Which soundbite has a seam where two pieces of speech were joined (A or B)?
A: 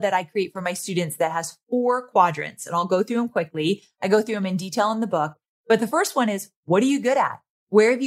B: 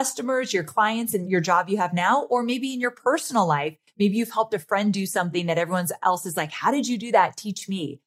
B